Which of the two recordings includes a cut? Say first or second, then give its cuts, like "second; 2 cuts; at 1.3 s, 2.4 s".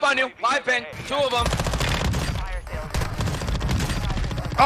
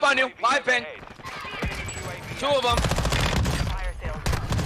first; 1 cut; at 0.9 s